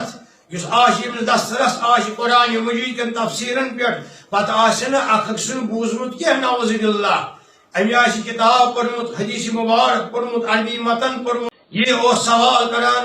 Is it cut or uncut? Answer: cut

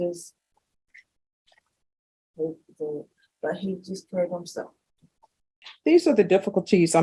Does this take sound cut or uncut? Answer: cut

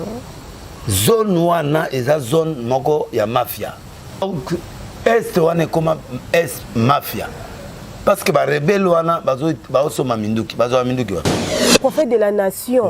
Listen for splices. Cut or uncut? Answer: cut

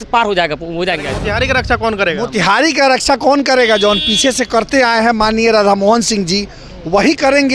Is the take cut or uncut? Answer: cut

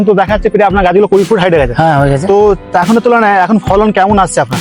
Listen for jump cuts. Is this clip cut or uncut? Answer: uncut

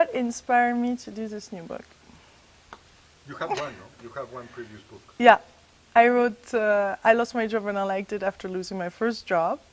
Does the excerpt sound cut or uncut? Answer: cut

